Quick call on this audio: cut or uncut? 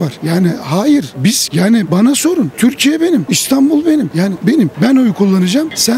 uncut